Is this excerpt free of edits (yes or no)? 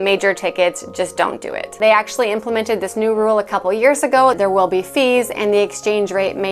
no